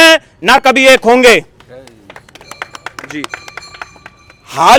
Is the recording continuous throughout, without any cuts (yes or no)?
yes